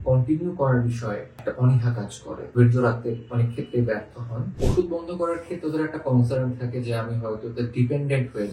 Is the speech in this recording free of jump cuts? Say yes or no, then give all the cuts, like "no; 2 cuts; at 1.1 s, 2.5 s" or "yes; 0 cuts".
no; 3 cuts; at 1.4 s, 2.5 s, 4.6 s